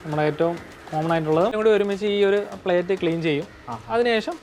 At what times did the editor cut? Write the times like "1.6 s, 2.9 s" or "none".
1.5 s